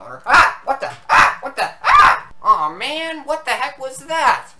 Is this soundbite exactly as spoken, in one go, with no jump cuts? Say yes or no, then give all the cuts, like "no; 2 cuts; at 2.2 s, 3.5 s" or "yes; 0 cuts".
no; 1 cut; at 2.3 s